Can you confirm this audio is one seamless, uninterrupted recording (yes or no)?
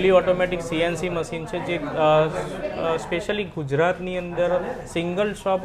yes